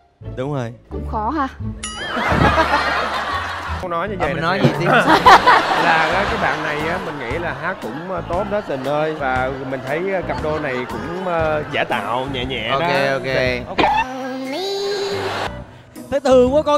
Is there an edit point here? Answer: yes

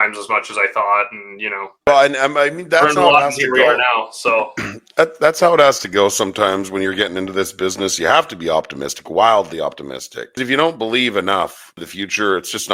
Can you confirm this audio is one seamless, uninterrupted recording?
no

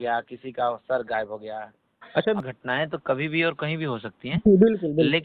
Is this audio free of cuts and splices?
no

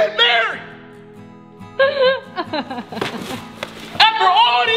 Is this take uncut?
yes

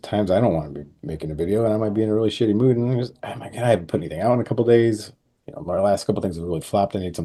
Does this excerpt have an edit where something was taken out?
no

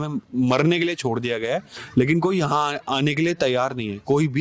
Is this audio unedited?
yes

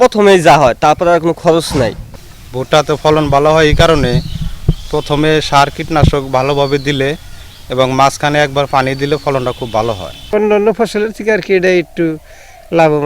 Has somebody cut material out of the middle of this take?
yes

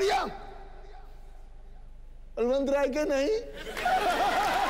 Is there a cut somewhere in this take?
no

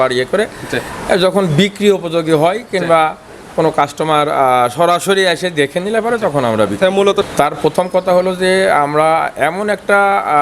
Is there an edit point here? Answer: yes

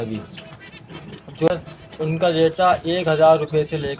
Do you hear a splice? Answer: yes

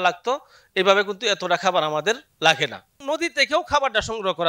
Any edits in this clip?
yes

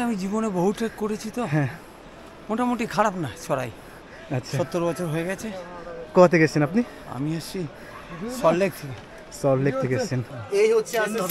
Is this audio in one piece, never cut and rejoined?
no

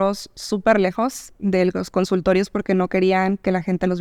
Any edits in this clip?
no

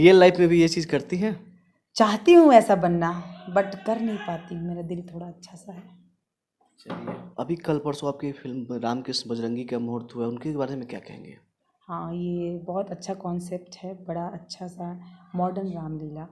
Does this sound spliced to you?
no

